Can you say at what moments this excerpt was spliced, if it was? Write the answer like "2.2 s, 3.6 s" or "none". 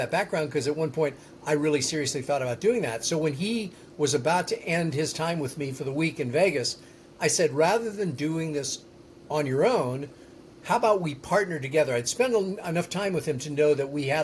none